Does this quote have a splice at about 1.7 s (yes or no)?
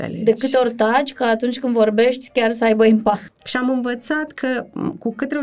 no